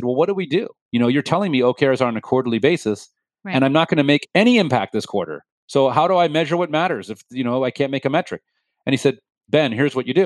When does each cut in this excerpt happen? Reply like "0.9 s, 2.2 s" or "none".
9.3 s